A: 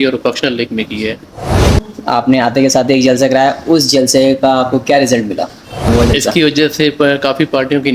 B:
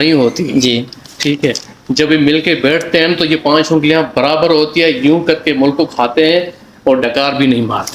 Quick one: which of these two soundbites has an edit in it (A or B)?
A